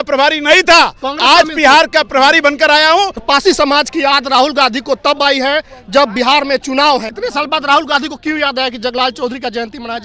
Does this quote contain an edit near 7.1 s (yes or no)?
yes